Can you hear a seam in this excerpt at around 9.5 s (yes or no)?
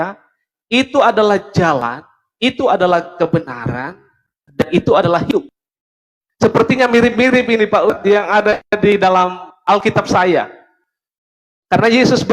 yes